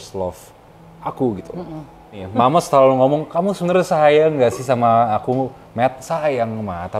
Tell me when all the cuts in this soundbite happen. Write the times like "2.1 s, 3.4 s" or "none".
2.2 s